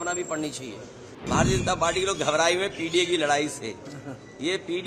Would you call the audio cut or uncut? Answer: cut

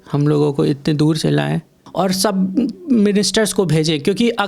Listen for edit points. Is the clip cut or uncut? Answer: cut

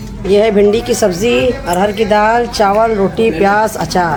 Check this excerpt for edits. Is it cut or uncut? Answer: uncut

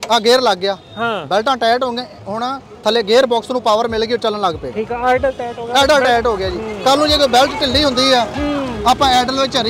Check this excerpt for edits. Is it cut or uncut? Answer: uncut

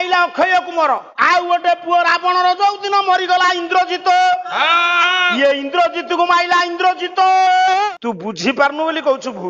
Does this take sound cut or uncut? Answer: cut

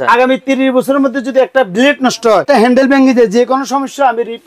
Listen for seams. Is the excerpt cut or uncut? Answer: cut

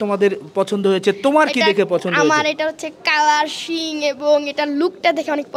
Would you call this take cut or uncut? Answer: uncut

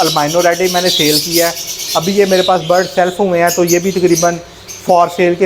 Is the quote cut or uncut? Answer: uncut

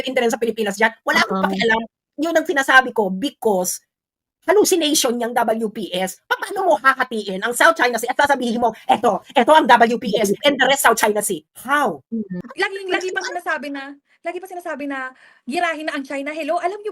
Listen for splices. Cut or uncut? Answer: cut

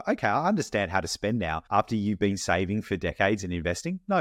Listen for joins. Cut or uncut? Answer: cut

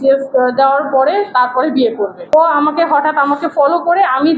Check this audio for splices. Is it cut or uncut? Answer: cut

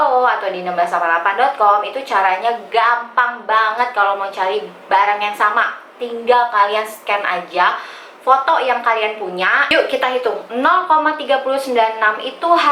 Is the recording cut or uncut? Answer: cut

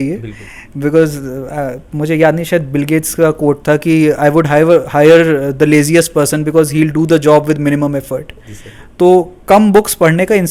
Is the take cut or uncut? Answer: uncut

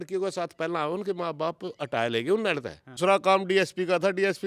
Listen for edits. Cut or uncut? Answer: cut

